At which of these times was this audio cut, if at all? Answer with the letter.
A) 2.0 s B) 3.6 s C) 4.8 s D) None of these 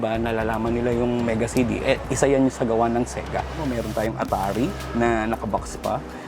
B